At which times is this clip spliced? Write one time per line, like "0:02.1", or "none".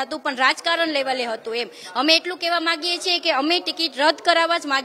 none